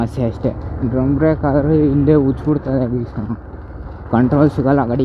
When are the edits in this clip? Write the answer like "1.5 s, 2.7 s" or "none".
none